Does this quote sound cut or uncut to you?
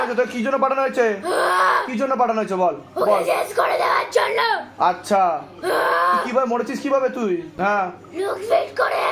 cut